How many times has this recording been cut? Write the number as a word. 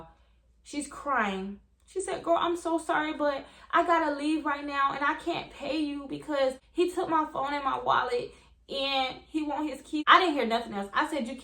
two